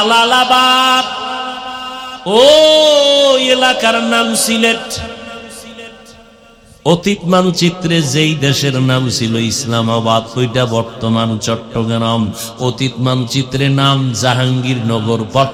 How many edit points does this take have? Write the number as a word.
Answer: zero